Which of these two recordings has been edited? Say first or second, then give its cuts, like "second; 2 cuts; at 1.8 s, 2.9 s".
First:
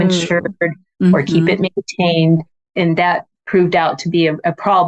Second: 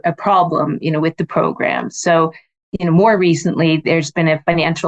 first; 1 cut; at 2.9 s